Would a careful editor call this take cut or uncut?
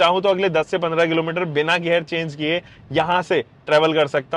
uncut